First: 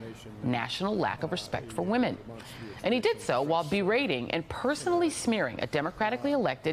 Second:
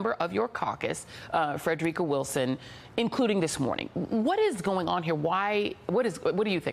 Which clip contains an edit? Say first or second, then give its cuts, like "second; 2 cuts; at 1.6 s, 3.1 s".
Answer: first; 1 cut; at 4.2 s